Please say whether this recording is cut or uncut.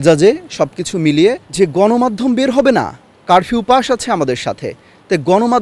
cut